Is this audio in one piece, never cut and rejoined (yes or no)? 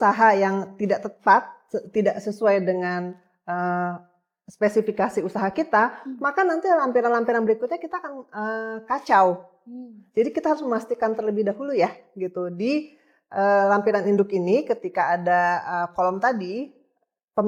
yes